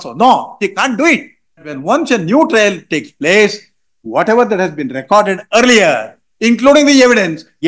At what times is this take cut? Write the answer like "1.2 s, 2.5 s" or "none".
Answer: 1.7 s